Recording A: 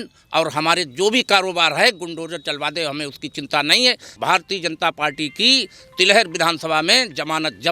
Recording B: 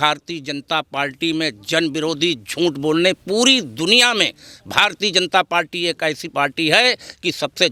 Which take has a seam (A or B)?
A